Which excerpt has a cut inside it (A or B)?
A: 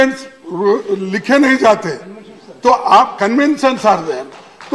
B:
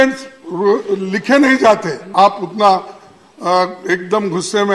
B